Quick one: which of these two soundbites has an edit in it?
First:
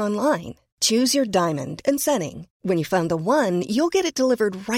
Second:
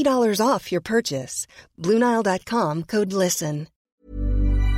second; 1 cut; at 3.7 s

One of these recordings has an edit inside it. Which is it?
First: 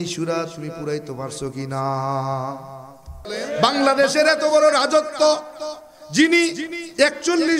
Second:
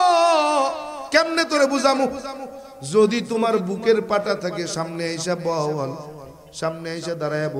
first; 1 cut; at 3.3 s

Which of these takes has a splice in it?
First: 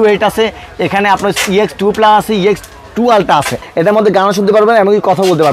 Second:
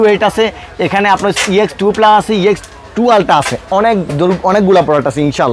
first; 1 cut; at 3.6 s

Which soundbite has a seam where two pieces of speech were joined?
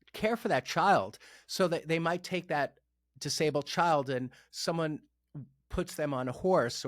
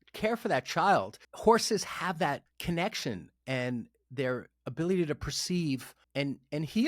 second; 1 cut; at 1.2 s

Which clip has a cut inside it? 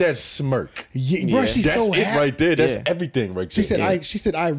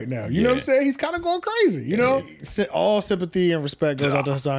second; 1 cut; at 2.4 s

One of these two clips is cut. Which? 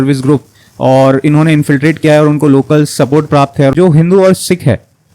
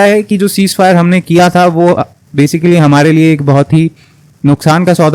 first; 1 cut; at 3.7 s

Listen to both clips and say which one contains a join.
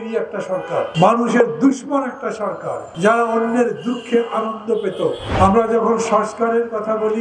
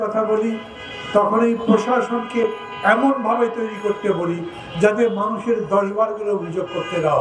first; 3 cuts; at 0.9 s, 2.9 s, 5.3 s

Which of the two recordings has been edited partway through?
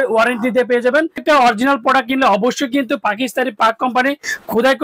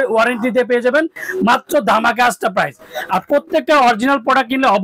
first; 1 cut; at 1.2 s

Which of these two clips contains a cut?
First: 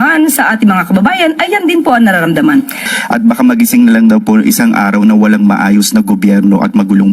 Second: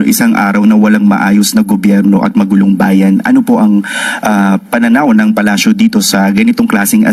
first; 1 cut; at 2.9 s

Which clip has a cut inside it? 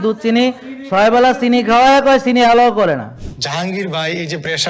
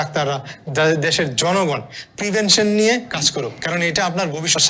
first; 1 cut; at 3.1 s

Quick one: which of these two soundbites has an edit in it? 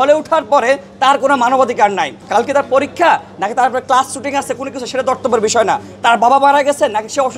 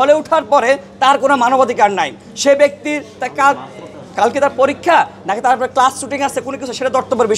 first; 1 cut; at 2.2 s

